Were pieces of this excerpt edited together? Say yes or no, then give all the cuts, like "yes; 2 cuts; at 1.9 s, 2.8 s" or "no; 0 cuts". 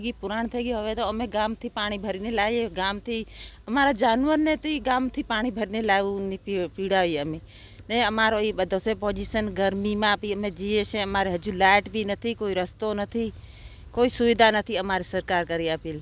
no; 0 cuts